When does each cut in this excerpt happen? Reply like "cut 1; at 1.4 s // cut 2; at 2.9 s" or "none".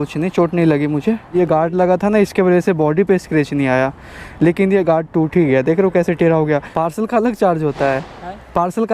cut 1; at 1.3 s // cut 2; at 6.7 s